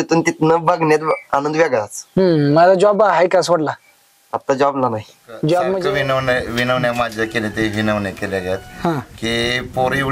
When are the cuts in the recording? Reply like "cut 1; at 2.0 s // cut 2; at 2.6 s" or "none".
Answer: cut 1; at 5.7 s

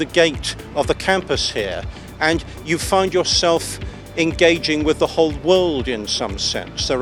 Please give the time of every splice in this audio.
none

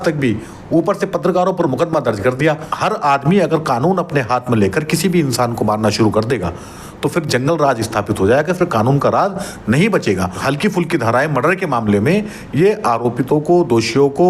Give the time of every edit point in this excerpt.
cut 1; at 2.7 s // cut 2; at 10.4 s

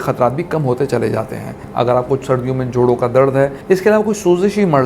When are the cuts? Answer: cut 1; at 1.6 s

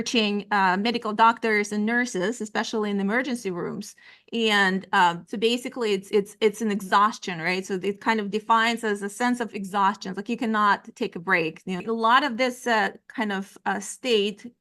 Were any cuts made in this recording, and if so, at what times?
cut 1; at 11.8 s

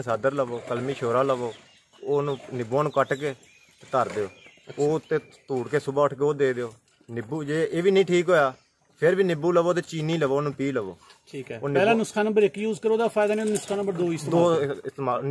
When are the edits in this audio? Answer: none

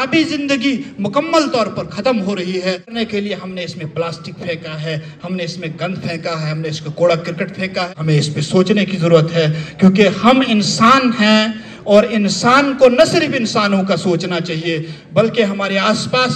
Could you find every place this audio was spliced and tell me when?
cut 1; at 3.0 s // cut 2; at 7.9 s

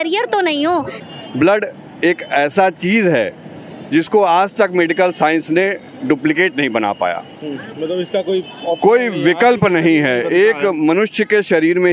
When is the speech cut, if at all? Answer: cut 1; at 1.0 s

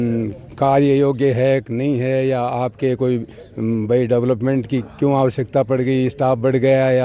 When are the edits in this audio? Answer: none

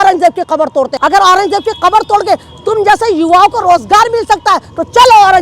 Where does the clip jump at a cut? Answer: cut 1; at 0.9 s

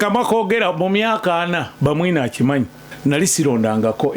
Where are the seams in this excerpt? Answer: cut 1; at 2.8 s

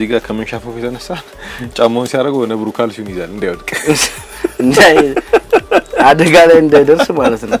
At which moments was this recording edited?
none

